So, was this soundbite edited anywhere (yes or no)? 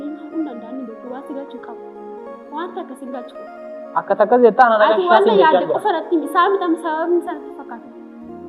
yes